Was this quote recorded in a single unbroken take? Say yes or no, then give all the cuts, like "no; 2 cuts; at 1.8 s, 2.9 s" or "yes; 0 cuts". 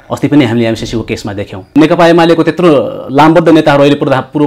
no; 1 cut; at 1.7 s